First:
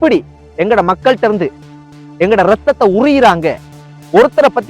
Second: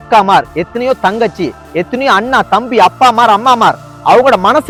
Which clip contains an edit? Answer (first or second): first